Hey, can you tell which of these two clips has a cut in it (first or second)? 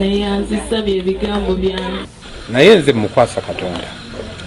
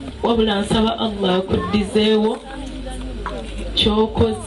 first